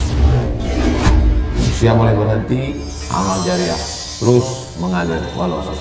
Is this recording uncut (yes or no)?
yes